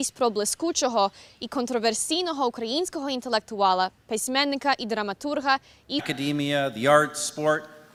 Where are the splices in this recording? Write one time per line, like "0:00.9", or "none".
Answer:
none